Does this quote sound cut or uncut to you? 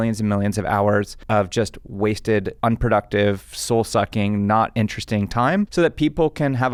uncut